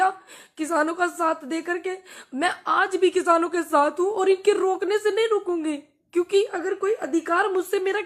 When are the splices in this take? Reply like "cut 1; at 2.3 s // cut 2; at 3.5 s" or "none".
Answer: none